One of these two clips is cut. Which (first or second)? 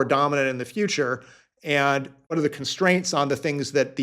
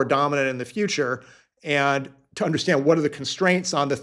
first